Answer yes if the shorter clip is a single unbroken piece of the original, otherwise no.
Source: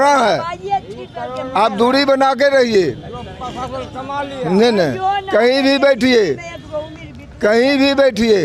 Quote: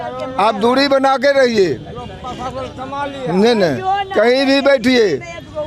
yes